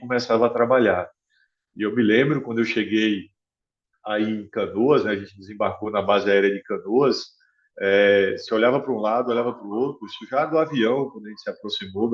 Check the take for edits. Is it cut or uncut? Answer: uncut